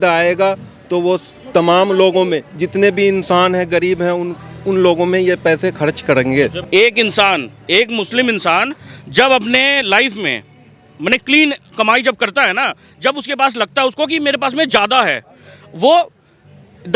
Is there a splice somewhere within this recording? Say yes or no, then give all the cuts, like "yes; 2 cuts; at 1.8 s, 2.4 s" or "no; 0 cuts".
yes; 1 cut; at 6.6 s